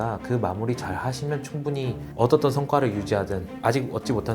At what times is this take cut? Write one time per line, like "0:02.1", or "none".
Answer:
0:02.0
0:03.5